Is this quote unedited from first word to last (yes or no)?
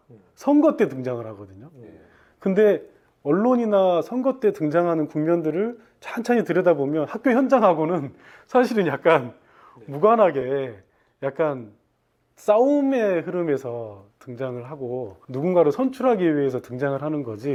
yes